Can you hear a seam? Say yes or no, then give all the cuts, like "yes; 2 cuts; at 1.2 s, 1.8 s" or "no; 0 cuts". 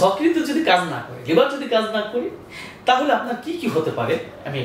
no; 0 cuts